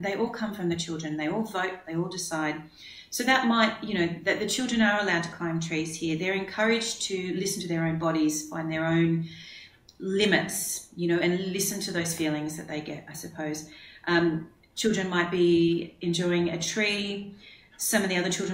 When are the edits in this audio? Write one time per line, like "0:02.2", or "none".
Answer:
none